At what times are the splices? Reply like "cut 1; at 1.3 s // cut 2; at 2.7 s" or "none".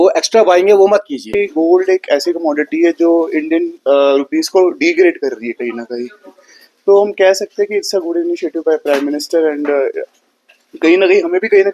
cut 1; at 1.3 s